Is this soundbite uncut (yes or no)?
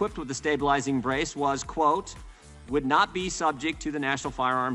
yes